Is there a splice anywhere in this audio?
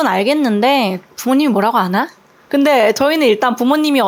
no; 0 cuts

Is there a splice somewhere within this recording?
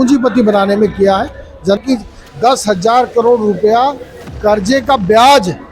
yes; 1 cut; at 1.8 s

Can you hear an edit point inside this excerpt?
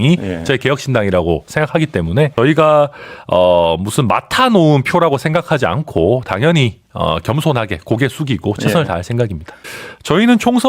yes; 2 cuts; at 2.3 s, 9.5 s

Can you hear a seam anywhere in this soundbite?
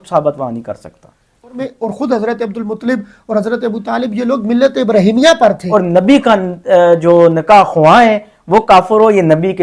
yes; 2 cuts; at 1.6 s, 5.6 s

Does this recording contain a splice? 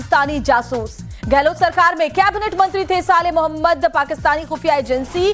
no; 0 cuts

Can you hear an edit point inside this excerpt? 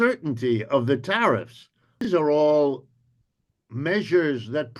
yes; 1 cut; at 2.1 s

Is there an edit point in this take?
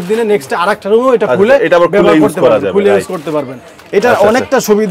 no; 0 cuts

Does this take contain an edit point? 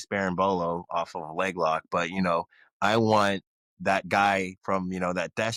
no; 0 cuts

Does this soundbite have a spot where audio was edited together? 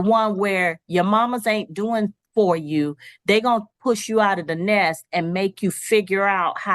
no; 0 cuts

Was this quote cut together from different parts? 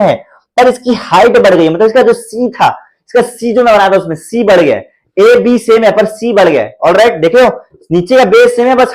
no; 0 cuts

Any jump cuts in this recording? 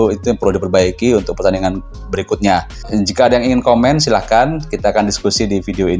yes; 1 cut; at 2.8 s

